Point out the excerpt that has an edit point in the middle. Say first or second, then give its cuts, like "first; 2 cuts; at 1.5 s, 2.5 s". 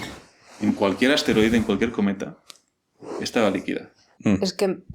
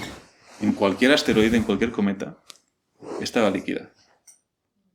first; 1 cut; at 4.0 s